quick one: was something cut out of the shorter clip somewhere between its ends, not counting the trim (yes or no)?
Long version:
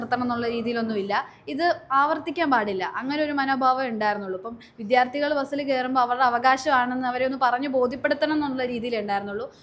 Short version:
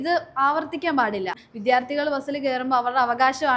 yes